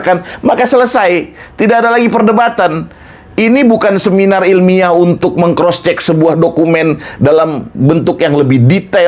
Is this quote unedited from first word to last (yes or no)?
yes